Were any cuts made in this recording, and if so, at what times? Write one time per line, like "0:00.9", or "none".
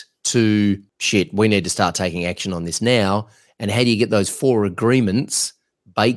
0:00.9